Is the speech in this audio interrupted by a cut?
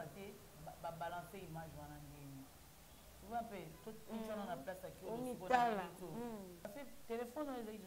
yes; 1 cut; at 6.7 s

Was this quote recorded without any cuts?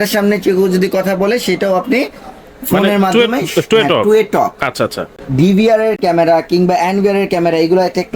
yes; 0 cuts

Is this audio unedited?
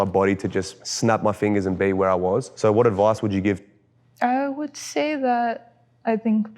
no; 2 cuts; at 2.5 s, 3.7 s

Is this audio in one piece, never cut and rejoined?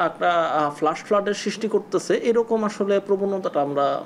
yes; 0 cuts

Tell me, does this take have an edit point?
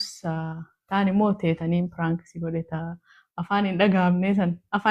no; 0 cuts

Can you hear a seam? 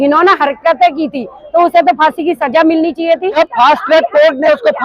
yes; 1 cut; at 3.4 s

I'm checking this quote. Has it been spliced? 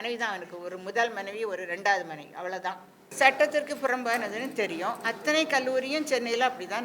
yes; 1 cut; at 3.0 s

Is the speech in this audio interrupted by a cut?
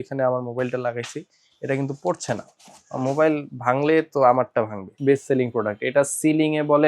yes; 1 cut; at 4.8 s

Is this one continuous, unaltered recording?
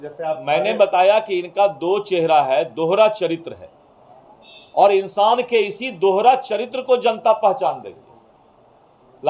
yes; 0 cuts

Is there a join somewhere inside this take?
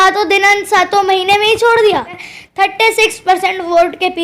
yes; 1 cut; at 2.3 s

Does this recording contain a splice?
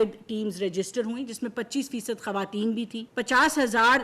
yes; 1 cut; at 3.0 s

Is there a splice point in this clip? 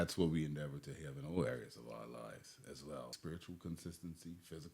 yes; 1 cut; at 3.2 s

